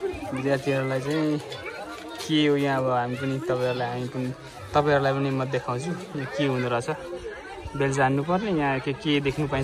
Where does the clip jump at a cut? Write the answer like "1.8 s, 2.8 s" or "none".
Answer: none